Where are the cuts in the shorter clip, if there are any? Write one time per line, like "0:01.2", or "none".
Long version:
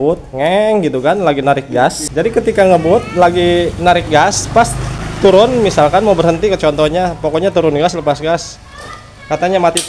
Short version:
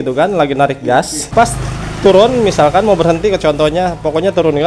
0:01.2

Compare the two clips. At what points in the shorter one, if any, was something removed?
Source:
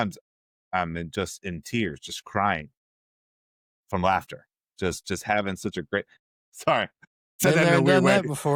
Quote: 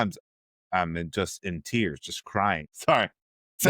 0:02.7

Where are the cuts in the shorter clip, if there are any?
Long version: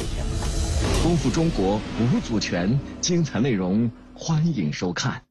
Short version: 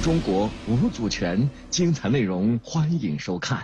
0:02.7

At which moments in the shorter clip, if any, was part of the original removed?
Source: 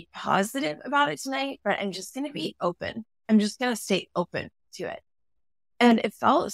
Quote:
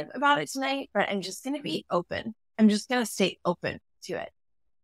none

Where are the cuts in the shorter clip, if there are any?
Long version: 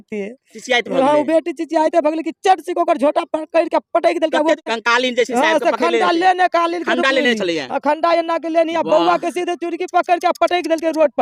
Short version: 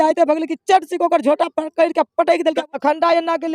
0:02.6

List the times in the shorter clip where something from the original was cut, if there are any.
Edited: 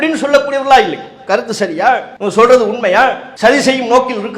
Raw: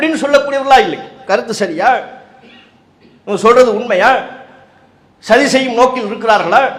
0:02.1
0:03.3

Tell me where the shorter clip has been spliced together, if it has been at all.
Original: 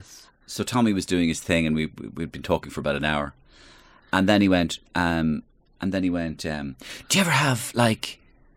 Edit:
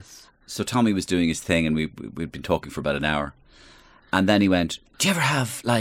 0:04.8

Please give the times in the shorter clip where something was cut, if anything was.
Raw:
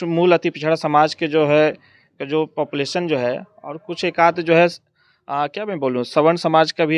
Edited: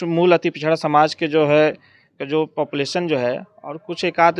none

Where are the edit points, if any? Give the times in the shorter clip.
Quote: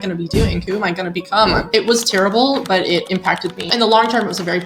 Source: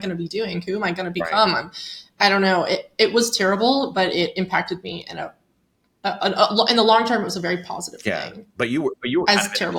0:01.6
0:03.7

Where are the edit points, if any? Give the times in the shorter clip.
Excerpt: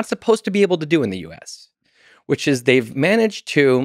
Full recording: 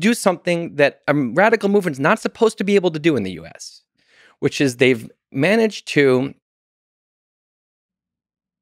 0:02.9

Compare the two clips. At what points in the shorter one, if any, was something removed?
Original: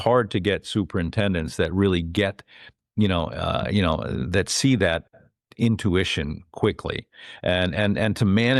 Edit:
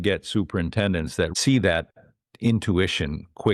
0:01.3

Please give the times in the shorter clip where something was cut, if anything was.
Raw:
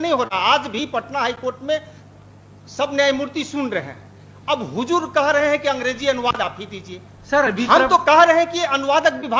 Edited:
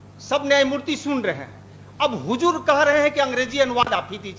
none

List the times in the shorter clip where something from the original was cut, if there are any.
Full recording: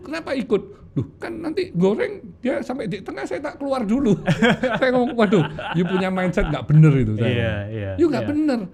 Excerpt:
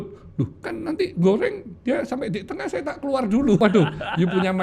0:03.6

